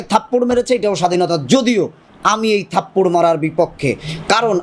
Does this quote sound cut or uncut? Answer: uncut